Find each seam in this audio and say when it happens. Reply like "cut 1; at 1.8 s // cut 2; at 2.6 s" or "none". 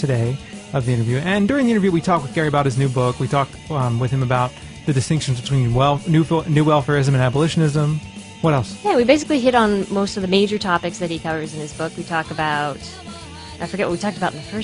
cut 1; at 7.0 s